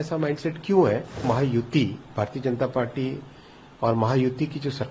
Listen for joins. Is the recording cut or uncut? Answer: cut